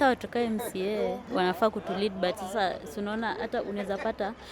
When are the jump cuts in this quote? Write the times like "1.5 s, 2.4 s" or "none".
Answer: 1.2 s